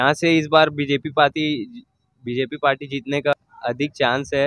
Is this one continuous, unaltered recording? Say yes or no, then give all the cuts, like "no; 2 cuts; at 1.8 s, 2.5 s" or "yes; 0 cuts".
no; 1 cut; at 3.5 s